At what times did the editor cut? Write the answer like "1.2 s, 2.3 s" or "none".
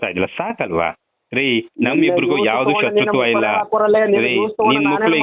none